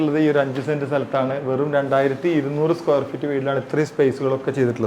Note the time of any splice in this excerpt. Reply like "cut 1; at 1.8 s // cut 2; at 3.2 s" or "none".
none

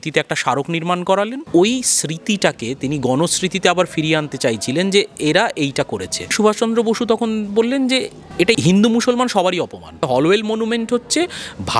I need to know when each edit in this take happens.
cut 1; at 1.5 s // cut 2; at 6.3 s // cut 3; at 8.4 s // cut 4; at 10.1 s

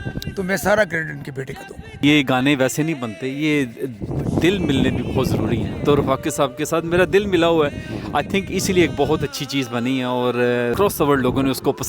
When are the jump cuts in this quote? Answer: cut 1; at 2.0 s // cut 2; at 10.7 s

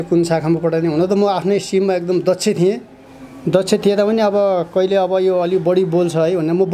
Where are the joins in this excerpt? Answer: none

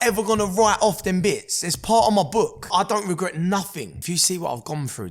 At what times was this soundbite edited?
cut 1; at 2.7 s // cut 2; at 4.0 s

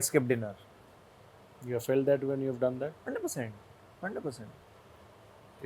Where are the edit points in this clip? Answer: cut 1; at 4.6 s

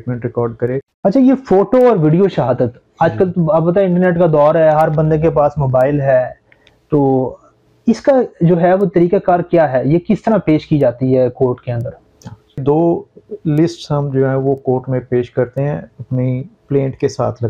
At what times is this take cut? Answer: cut 1; at 0.9 s // cut 2; at 12.6 s

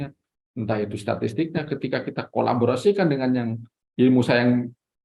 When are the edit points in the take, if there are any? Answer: none

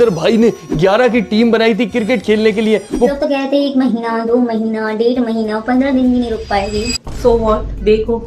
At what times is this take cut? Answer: cut 1; at 3.1 s

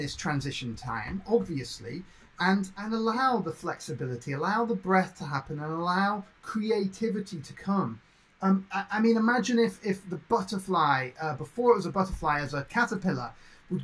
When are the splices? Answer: cut 1; at 2.8 s

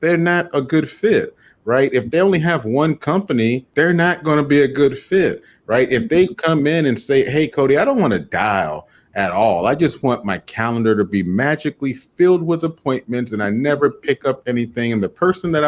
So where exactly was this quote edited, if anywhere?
cut 1; at 3.7 s

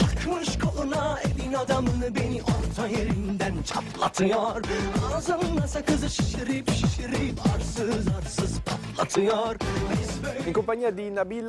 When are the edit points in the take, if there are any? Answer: none

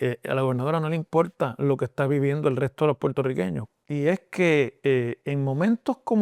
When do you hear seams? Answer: cut 1; at 3.6 s

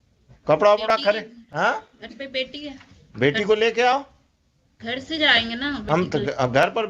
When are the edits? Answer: none

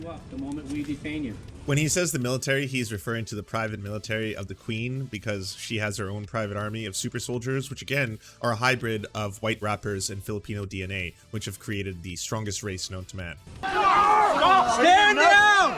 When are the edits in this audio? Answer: cut 1; at 1.5 s // cut 2; at 13.7 s

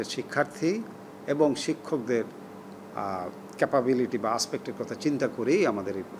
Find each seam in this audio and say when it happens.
none

